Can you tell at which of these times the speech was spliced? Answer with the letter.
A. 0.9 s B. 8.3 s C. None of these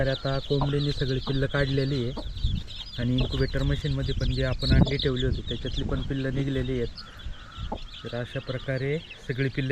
C